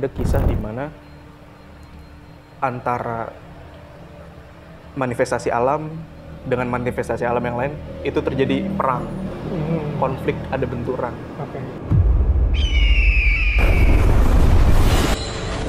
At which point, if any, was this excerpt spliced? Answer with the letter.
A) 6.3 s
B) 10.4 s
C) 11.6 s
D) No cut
C